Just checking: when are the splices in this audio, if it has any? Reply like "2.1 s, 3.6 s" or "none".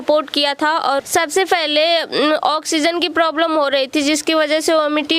1.0 s